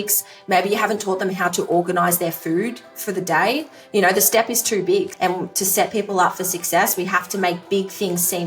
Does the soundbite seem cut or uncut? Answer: cut